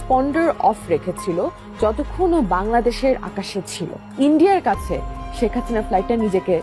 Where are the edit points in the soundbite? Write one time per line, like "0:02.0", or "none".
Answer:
0:04.0